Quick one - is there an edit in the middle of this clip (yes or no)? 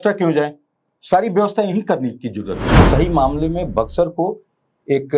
yes